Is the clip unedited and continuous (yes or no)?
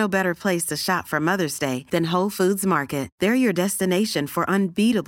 yes